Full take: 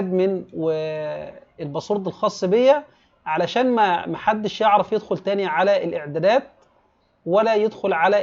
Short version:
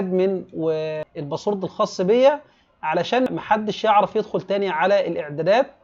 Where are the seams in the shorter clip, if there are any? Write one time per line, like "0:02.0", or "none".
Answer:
0:01.0
0:03.3